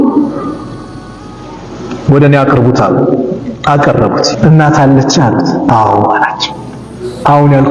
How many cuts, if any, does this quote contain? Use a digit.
1